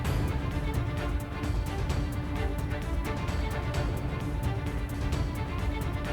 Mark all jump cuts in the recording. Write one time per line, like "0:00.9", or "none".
0:04.9